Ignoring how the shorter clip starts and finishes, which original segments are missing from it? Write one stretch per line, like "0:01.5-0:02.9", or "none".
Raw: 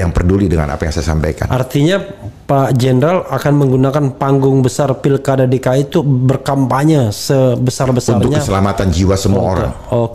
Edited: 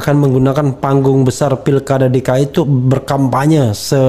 none